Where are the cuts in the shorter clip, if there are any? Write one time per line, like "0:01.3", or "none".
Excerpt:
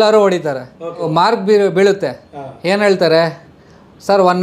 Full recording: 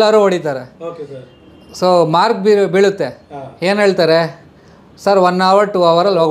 0:01.1

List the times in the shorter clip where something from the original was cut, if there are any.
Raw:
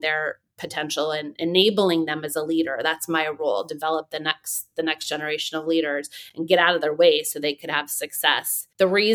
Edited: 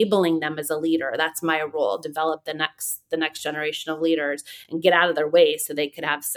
none

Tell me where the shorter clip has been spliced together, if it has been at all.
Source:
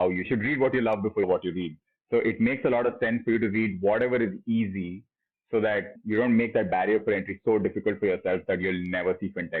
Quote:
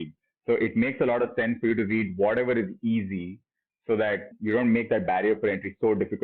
none

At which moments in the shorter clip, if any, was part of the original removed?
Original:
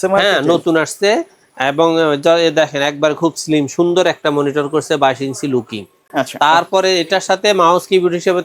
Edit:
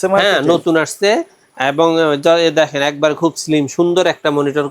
none

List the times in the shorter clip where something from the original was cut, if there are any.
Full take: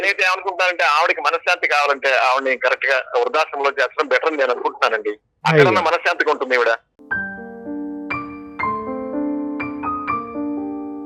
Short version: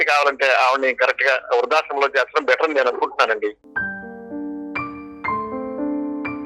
0:03.6

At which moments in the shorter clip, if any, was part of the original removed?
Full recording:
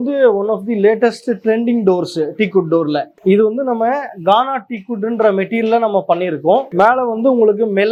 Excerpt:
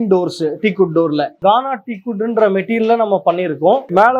0:01.3

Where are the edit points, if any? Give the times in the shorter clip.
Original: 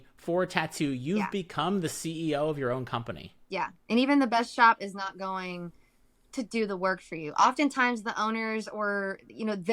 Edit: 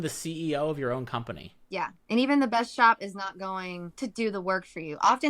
0:03.8

